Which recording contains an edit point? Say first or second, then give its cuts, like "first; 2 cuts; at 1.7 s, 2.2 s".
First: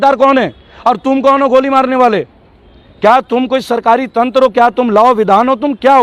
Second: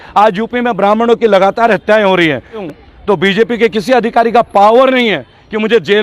second; 1 cut; at 2.6 s